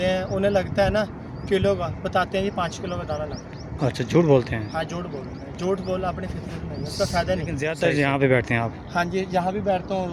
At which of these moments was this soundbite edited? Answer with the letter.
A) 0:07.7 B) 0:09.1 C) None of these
A